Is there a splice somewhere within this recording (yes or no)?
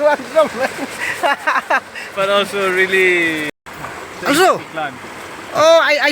yes